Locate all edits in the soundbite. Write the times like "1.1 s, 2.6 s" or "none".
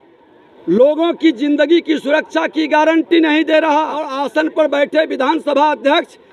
4.1 s